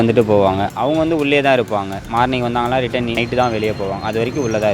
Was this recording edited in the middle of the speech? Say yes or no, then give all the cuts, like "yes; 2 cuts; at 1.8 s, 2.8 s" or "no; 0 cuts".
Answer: yes; 2 cuts; at 2.0 s, 3.2 s